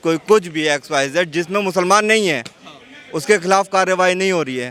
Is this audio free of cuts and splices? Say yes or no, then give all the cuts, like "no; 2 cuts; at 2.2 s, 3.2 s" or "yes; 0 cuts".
yes; 0 cuts